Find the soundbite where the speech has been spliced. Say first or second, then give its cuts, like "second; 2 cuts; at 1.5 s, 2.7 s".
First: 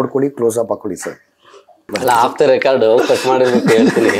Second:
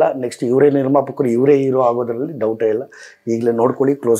first; 1 cut; at 1.9 s